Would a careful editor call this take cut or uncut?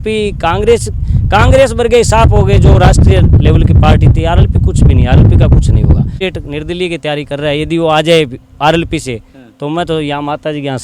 cut